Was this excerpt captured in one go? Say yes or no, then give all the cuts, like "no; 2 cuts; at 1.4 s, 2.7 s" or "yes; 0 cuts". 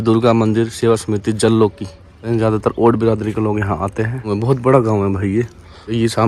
yes; 0 cuts